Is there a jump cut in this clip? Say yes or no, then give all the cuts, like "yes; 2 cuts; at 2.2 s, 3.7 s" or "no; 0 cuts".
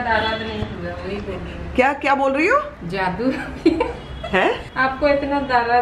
no; 0 cuts